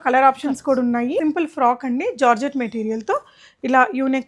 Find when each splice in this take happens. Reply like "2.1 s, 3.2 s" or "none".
1.2 s